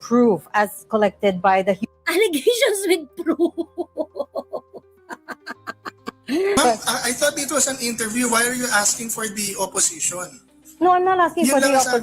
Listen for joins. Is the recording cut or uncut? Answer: cut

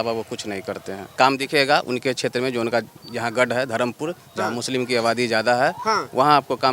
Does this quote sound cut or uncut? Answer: cut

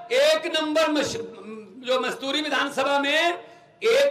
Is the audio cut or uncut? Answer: uncut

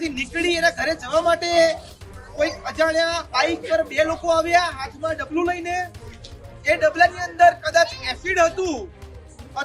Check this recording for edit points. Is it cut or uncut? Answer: uncut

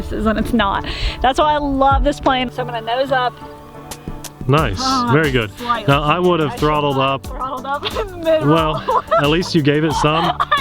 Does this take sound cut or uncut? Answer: cut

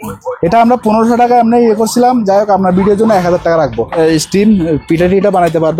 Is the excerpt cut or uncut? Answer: cut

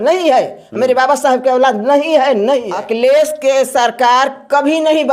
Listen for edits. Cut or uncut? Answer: cut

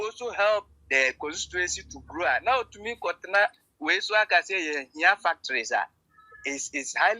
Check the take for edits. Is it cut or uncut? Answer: uncut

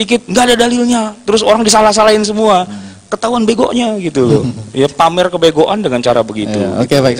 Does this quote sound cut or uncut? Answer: uncut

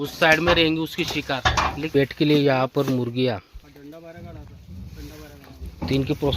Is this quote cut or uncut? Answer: cut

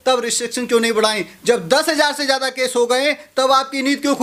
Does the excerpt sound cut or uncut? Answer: uncut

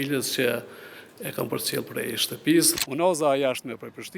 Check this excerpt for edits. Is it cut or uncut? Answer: cut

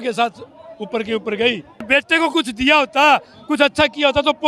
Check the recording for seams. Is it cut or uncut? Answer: cut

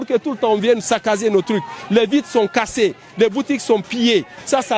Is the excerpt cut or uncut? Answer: cut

